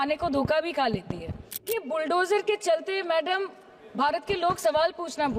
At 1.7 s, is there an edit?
yes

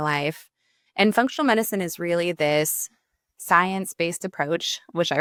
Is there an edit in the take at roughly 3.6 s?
no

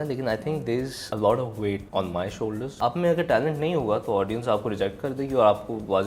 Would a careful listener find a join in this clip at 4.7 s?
no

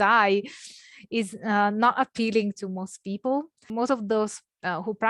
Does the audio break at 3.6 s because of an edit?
yes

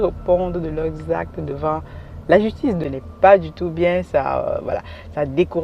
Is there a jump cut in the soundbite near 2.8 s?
yes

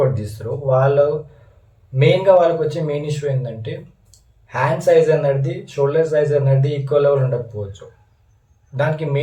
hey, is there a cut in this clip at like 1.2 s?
no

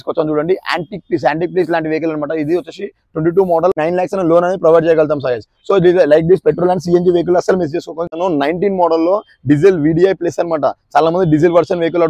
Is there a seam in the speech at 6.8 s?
no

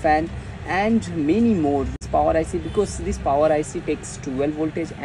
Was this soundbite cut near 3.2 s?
no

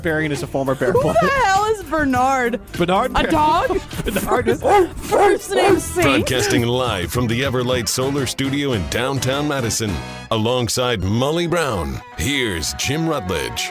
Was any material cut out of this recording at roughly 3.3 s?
no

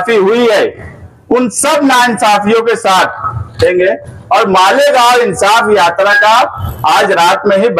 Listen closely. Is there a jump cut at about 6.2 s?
no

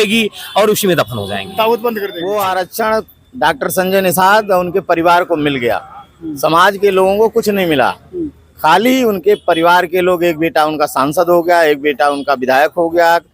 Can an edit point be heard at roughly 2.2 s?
yes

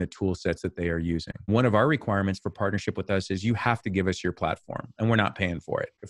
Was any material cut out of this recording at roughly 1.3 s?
yes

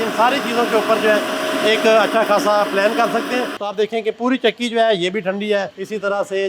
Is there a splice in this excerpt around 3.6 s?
yes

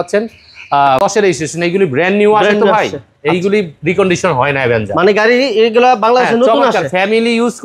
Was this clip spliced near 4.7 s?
no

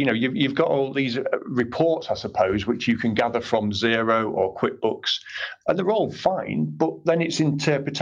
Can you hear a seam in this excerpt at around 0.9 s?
yes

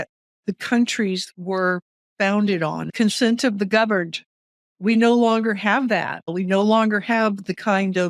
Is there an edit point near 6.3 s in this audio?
yes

